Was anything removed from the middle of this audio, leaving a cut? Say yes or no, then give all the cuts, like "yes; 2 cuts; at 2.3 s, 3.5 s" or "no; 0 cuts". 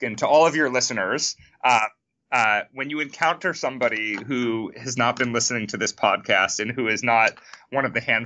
no; 0 cuts